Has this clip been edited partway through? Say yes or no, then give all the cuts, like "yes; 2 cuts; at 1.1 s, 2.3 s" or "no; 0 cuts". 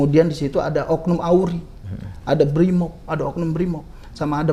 no; 0 cuts